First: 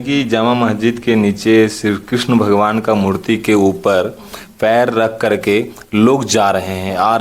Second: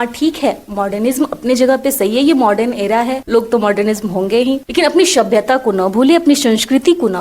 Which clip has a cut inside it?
second; 2 cuts; at 3.2 s, 4.6 s

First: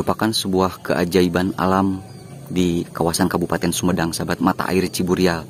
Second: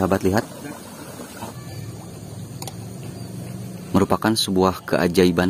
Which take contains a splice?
second; 1 cut; at 1.5 s

